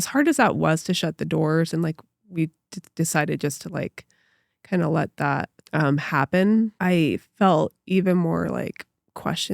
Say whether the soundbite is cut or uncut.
cut